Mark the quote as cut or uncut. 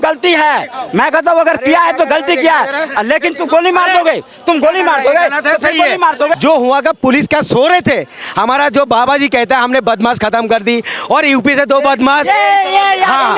cut